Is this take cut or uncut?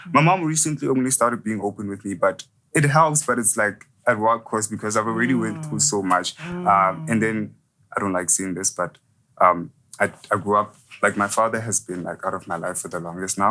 uncut